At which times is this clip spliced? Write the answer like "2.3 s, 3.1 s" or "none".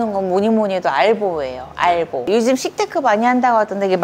none